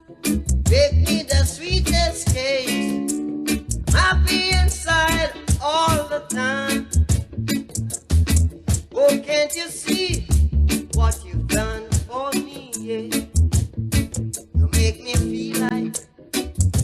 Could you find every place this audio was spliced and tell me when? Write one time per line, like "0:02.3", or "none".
0:14.8